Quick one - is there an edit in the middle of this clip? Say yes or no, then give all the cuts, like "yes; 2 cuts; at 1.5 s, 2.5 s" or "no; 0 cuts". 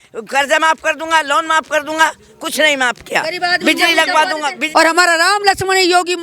yes; 1 cut; at 4.6 s